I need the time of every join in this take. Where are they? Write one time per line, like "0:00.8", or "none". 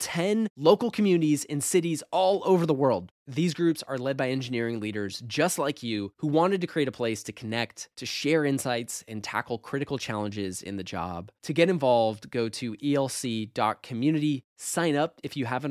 none

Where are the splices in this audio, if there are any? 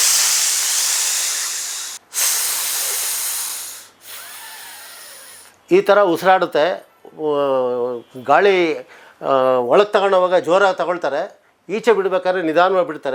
none

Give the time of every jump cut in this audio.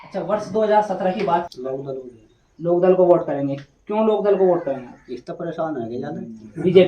0:01.5

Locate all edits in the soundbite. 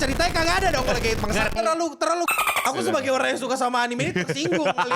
0:01.5
0:02.6

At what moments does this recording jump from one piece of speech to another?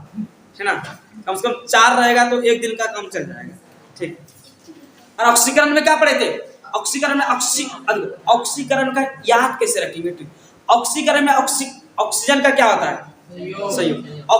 0:05.2

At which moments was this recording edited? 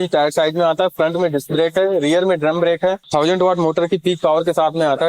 0:03.0

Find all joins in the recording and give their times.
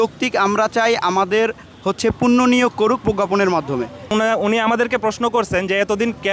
0:04.1

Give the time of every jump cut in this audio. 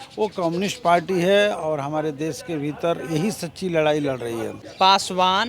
0:04.6

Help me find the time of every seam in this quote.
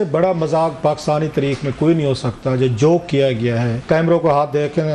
0:03.8

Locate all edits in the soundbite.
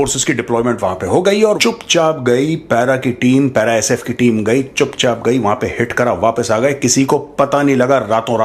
0:01.6

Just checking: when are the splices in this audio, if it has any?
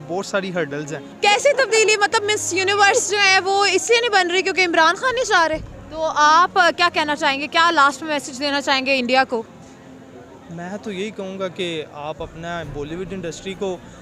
0:01.1
0:05.7

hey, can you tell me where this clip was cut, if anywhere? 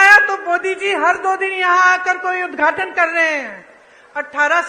none

